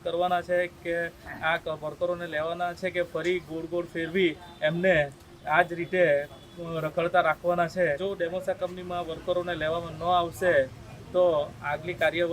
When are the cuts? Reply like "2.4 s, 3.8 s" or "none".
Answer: 8.0 s